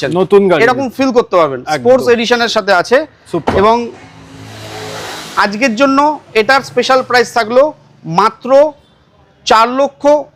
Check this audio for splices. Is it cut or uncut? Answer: uncut